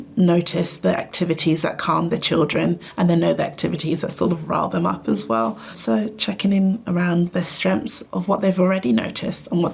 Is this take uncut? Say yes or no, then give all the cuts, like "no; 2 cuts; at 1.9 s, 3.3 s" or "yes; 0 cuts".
no; 1 cut; at 2.9 s